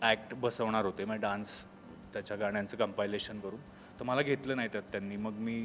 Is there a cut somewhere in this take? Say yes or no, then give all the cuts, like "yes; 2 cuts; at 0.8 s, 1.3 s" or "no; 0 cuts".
no; 0 cuts